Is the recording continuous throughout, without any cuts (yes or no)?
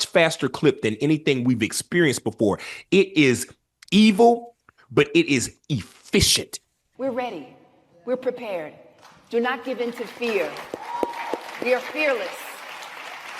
no